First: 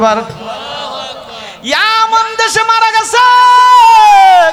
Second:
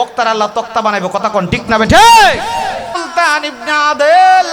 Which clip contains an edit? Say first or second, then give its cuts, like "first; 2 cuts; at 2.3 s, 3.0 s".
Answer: second; 1 cut; at 3.0 s